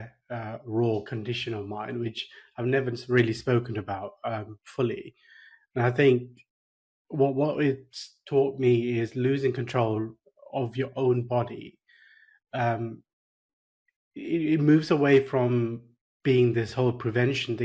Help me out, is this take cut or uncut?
uncut